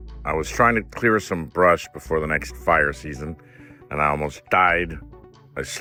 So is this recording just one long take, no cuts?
yes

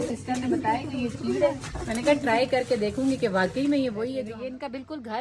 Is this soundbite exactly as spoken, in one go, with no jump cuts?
no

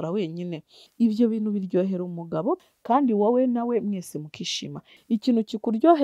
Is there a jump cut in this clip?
yes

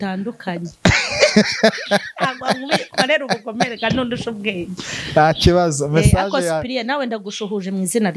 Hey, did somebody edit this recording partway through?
no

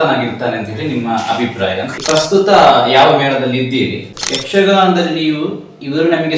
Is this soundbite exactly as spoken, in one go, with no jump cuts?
no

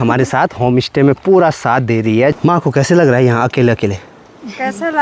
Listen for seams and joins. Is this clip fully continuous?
no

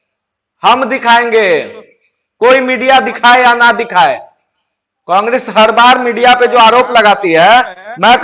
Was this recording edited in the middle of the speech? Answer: no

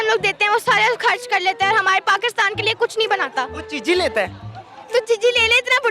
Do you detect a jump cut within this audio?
no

